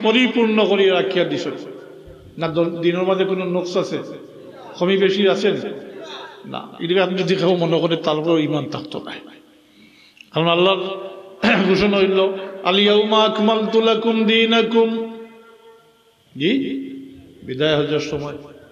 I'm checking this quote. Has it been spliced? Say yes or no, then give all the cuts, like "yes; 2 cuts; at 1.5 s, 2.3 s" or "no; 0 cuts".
no; 0 cuts